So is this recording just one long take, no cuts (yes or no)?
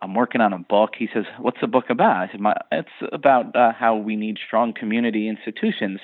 yes